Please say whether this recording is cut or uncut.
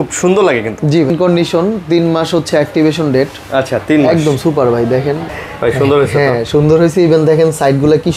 cut